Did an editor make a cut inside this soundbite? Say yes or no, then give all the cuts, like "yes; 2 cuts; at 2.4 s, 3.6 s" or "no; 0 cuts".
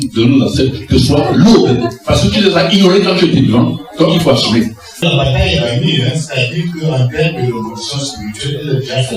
yes; 1 cut; at 5.0 s